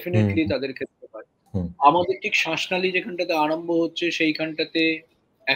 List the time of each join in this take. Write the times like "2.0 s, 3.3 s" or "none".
1.4 s